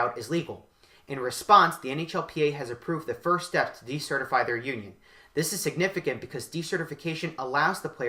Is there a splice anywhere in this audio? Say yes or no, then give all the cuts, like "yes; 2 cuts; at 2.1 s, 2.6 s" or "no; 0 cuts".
no; 0 cuts